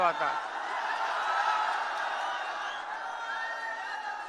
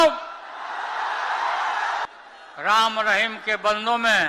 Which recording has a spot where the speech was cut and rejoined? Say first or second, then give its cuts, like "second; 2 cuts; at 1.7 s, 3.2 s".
second; 1 cut; at 2.1 s